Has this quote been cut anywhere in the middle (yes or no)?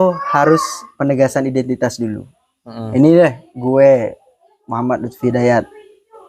no